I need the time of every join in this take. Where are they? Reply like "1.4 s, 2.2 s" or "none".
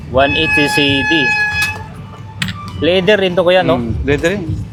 none

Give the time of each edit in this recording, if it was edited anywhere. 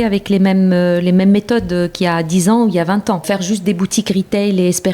3.2 s

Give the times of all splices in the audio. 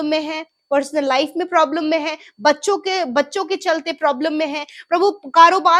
none

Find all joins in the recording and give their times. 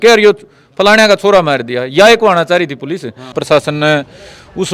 3.4 s

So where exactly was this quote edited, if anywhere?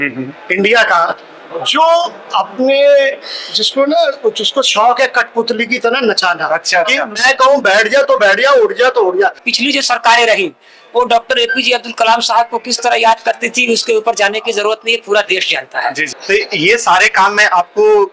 9.5 s, 16.1 s

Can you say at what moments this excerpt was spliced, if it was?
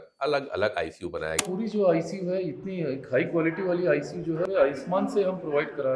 1.4 s, 4.4 s

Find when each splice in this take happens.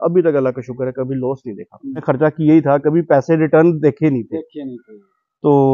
2.0 s

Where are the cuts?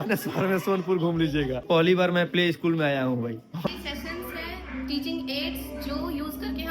1.6 s, 3.7 s

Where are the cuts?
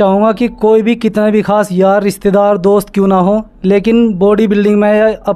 none

